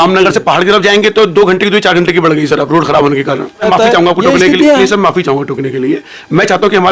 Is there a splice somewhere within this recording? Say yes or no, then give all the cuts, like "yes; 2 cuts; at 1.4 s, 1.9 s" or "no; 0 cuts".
yes; 1 cut; at 3.6 s